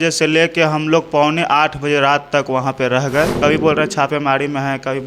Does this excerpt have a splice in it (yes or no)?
yes